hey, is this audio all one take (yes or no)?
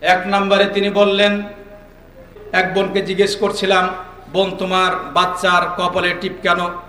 no